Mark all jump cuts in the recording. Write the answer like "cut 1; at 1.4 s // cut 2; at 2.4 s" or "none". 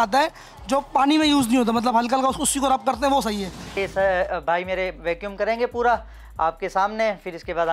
cut 1; at 3.8 s